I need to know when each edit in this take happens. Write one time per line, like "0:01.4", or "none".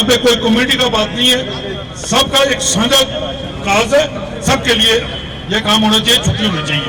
none